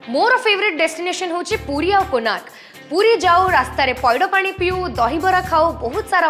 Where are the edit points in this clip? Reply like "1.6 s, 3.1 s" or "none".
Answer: none